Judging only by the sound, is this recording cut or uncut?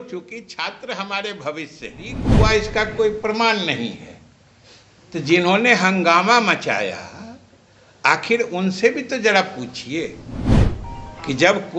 cut